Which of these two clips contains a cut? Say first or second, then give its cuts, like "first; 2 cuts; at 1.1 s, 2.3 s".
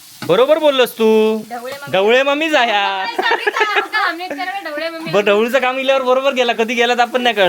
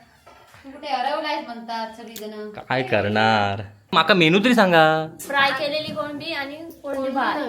second; 1 cut; at 3.7 s